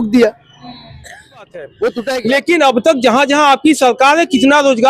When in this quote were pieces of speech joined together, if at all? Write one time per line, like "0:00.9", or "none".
0:02.2